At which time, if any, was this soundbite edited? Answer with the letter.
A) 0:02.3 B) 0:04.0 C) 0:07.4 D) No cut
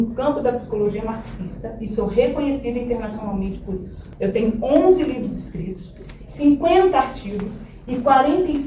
B